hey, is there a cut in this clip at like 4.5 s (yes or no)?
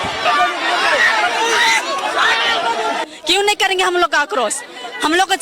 no